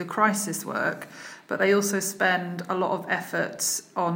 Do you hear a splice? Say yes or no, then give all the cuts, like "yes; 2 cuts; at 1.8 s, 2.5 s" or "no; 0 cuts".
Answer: no; 0 cuts